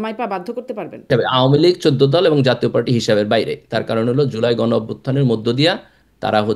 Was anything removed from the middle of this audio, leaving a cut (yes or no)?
yes